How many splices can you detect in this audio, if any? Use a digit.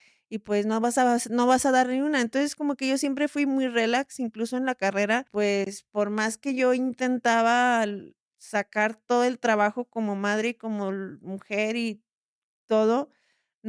1